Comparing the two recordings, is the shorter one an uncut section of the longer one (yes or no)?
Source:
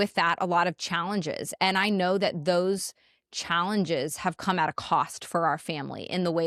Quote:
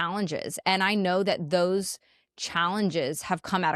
yes